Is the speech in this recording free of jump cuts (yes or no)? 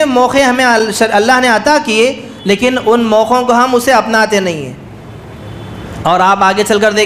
yes